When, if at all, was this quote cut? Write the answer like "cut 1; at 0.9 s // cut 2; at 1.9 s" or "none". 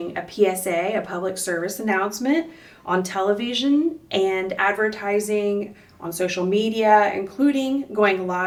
none